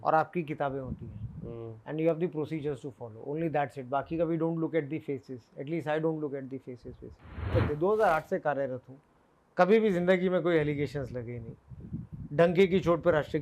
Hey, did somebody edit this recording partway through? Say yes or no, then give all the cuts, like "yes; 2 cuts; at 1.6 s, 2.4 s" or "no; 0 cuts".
yes; 1 cut; at 7.5 s